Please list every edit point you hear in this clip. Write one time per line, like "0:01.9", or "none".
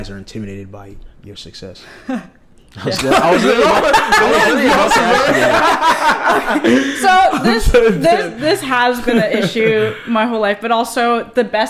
none